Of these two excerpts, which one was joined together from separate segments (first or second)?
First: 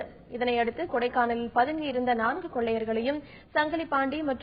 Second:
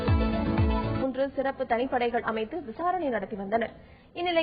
second